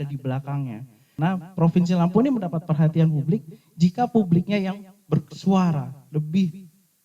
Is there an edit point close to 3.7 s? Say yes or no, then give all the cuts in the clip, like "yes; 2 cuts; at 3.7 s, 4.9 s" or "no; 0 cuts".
no; 1 cut; at 1.1 s